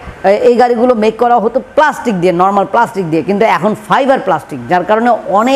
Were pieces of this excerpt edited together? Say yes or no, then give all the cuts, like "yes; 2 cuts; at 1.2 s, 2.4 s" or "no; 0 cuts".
no; 0 cuts